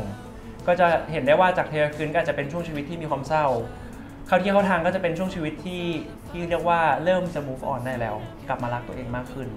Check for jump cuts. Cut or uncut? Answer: uncut